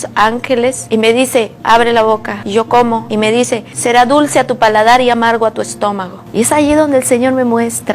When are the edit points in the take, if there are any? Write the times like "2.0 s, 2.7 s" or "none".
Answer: 0.8 s, 2.3 s, 3.3 s, 6.1 s